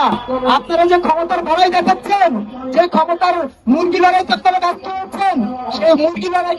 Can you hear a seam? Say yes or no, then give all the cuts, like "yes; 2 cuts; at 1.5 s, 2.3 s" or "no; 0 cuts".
no; 0 cuts